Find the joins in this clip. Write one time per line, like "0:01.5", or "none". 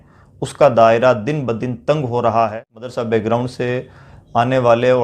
0:02.9